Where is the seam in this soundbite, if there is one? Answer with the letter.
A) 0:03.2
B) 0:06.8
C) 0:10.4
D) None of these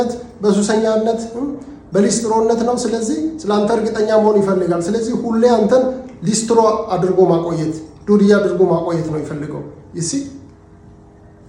D